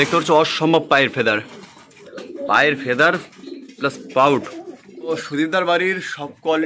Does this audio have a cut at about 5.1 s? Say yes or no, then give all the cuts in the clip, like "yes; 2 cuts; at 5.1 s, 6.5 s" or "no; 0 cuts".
yes; 1 cut; at 5.1 s